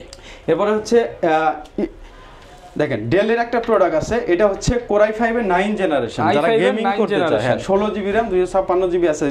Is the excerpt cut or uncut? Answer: uncut